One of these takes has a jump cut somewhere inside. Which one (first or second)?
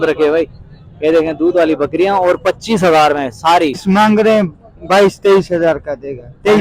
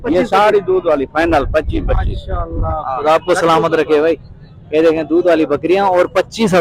first